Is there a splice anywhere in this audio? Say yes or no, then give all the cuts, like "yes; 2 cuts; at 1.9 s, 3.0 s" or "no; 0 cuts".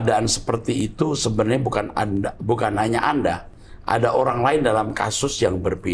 no; 0 cuts